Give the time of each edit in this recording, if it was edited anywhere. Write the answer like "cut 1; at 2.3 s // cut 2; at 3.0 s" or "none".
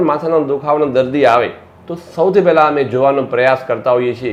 none

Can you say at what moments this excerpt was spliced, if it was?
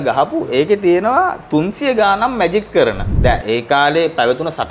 cut 1; at 3.1 s

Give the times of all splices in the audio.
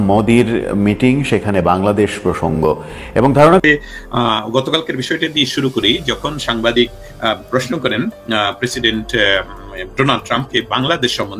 cut 1; at 3.6 s

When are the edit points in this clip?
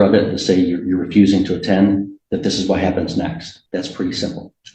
cut 1; at 3.5 s

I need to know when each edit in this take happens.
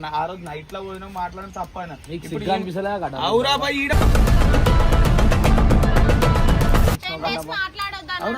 cut 1; at 7.0 s

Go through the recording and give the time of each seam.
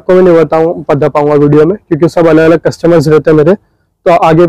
none

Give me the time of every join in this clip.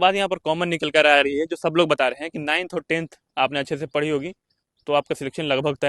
none

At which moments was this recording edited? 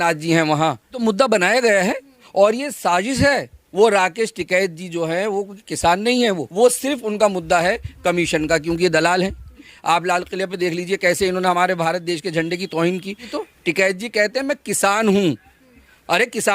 cut 1; at 1.0 s // cut 2; at 3.6 s // cut 3; at 6.5 s // cut 4; at 9.6 s // cut 5; at 13.3 s

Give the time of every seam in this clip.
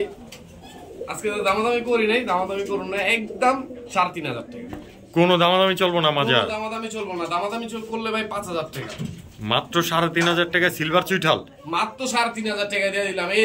none

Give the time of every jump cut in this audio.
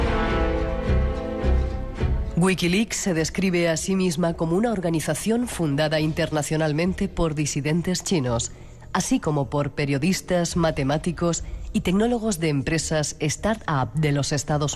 cut 1; at 8.7 s

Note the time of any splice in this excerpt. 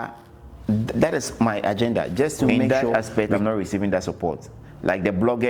cut 1; at 2.7 s

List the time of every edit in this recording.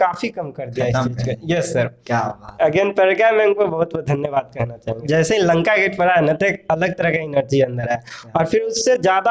cut 1; at 5.0 s

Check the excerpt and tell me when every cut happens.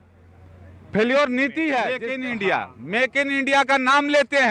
cut 1; at 2.0 s

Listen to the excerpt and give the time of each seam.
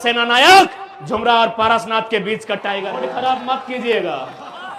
cut 1; at 2.9 s

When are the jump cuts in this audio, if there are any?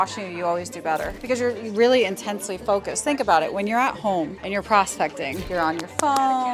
cut 1; at 1.1 s // cut 2; at 4.4 s // cut 3; at 5.4 s

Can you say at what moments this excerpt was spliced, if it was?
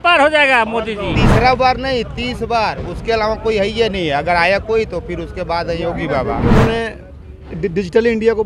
cut 1; at 1.2 s // cut 2; at 6.4 s

